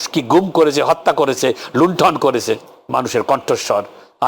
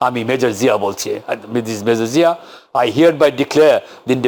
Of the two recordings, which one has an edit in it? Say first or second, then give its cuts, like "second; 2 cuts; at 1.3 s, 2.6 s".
first; 1 cut; at 2.7 s